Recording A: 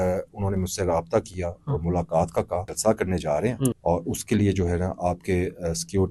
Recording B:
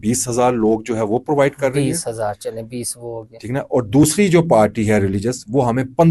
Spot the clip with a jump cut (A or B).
A